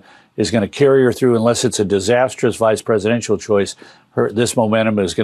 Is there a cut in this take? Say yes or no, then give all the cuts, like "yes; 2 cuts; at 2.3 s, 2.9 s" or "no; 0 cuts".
no; 0 cuts